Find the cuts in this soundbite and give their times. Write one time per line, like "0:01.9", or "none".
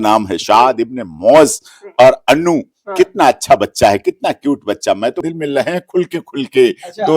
0:05.2